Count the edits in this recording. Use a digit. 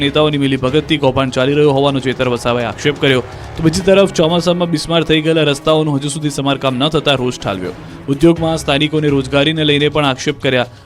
1